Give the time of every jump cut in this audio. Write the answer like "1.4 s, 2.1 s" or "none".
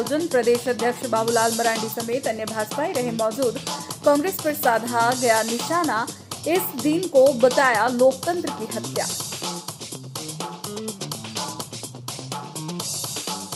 none